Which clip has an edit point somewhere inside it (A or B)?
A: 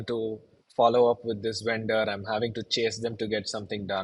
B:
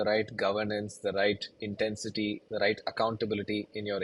B